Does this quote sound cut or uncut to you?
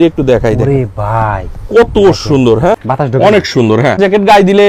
cut